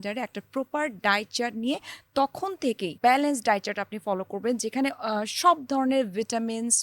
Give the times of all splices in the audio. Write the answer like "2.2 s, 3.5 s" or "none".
3.0 s